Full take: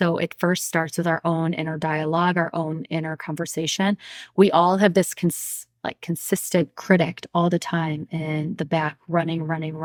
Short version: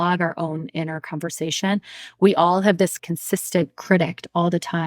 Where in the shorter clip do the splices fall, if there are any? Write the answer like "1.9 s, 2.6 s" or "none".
3.0 s